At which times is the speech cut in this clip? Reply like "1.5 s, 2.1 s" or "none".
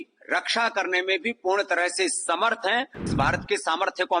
3.1 s